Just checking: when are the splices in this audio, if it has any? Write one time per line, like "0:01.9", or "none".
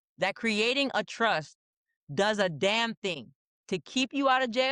none